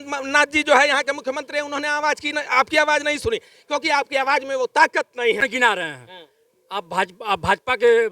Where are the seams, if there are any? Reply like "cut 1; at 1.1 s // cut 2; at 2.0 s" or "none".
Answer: cut 1; at 5.4 s